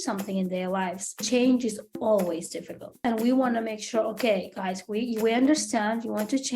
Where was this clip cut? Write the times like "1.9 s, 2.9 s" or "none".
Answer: 1.2 s, 3.0 s